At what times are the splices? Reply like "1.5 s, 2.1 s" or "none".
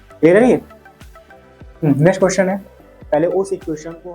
2.9 s